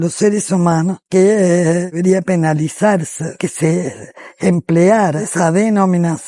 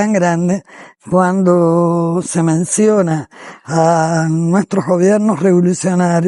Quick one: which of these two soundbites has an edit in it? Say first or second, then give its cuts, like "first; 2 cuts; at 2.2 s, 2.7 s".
first; 4 cuts; at 1.0 s, 2.2 s, 3.4 s, 5.2 s